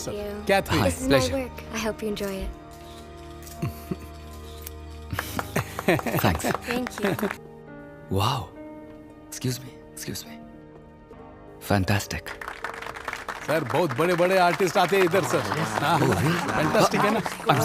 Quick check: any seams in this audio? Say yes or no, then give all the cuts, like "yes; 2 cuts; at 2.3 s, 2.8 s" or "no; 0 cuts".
yes; 2 cuts; at 7.4 s, 11.1 s